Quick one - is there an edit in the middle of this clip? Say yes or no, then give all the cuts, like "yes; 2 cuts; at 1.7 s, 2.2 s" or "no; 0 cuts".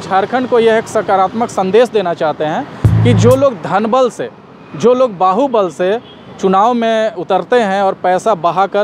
no; 0 cuts